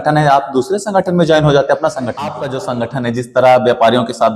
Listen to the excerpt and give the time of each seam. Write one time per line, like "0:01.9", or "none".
0:02.4